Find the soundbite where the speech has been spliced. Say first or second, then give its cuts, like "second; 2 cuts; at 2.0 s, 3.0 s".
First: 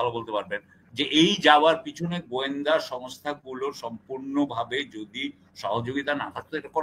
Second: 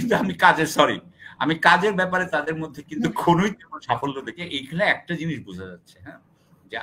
second; 1 cut; at 4.4 s